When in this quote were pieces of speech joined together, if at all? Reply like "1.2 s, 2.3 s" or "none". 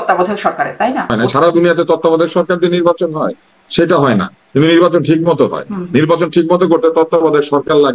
1.2 s